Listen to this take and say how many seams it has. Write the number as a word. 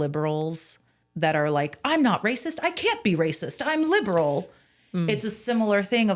one